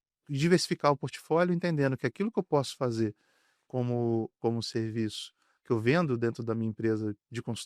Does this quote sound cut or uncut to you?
uncut